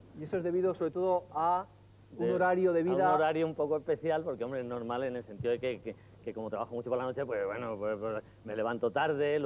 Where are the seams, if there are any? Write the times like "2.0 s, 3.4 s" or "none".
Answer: none